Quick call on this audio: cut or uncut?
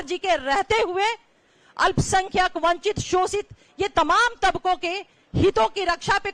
uncut